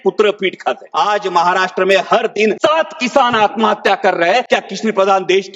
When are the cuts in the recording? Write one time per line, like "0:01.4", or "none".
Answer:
0:00.9
0:02.6
0:04.4